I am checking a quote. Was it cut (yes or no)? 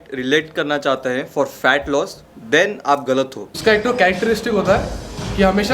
yes